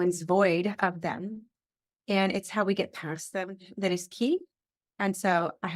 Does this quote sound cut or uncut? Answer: uncut